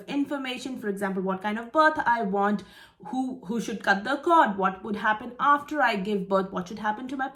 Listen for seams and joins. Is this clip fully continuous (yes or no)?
yes